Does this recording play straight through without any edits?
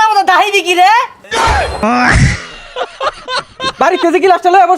no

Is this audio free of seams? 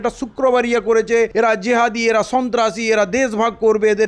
no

